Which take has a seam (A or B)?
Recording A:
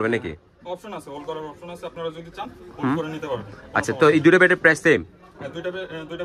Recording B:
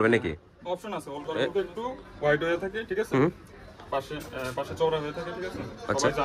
B